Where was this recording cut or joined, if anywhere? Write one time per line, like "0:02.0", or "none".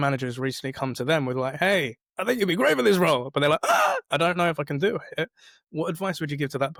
none